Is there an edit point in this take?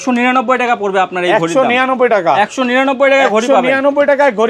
no; 0 cuts

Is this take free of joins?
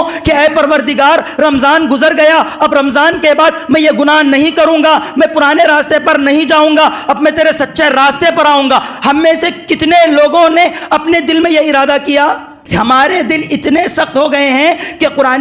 no; 1 cut; at 12.8 s

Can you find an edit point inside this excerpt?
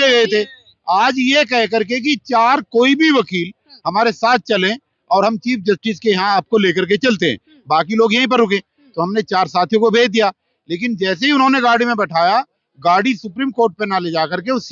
no; 0 cuts

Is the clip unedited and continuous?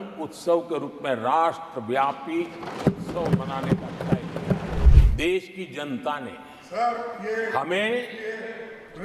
no; 1 cut; at 4.8 s

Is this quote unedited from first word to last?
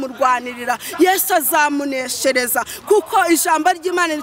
yes; 0 cuts

